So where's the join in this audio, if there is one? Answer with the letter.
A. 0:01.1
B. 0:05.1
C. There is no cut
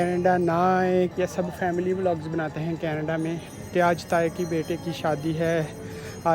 A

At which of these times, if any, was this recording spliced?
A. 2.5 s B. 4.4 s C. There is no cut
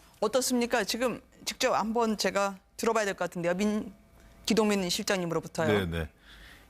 C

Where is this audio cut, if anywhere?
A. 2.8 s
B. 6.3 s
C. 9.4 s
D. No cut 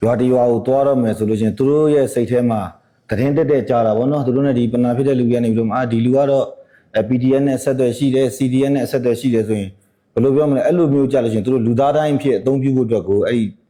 D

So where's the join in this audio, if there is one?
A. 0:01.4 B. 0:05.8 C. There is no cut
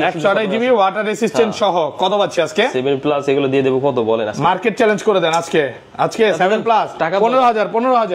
C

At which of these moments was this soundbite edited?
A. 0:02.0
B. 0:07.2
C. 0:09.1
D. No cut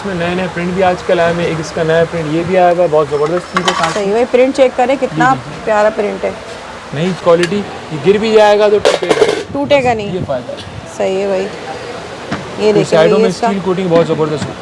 B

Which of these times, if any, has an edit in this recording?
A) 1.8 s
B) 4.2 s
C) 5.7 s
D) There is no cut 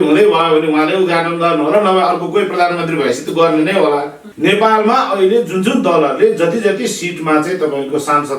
B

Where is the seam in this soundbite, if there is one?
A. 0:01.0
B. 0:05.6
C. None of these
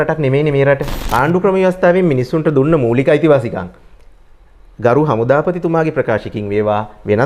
A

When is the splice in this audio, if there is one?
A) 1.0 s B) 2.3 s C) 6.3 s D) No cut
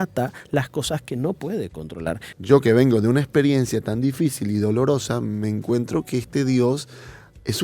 B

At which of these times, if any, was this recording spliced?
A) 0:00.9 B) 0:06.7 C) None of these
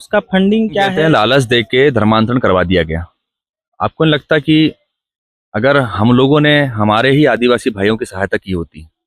A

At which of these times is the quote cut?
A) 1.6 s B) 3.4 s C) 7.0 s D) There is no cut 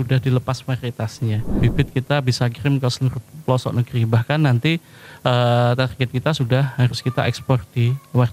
A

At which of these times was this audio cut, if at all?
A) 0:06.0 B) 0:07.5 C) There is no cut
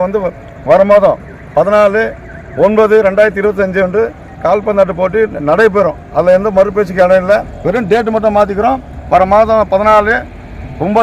B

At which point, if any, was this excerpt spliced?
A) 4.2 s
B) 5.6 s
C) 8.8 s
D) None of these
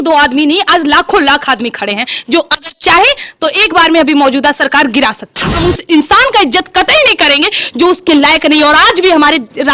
B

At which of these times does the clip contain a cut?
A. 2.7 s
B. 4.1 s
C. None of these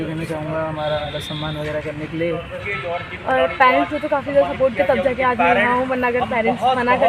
A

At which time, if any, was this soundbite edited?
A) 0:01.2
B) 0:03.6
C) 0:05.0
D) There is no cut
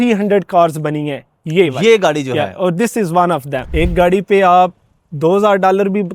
B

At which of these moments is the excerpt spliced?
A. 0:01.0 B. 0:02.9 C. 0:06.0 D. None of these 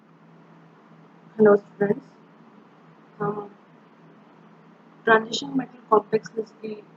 A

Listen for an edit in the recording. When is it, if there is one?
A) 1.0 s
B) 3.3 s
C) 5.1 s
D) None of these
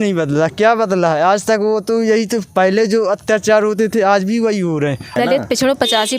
C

